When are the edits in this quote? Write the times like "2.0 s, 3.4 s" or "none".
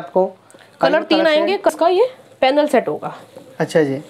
1.7 s